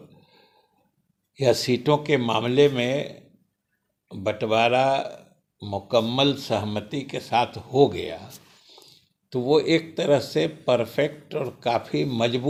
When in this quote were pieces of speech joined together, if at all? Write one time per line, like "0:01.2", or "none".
none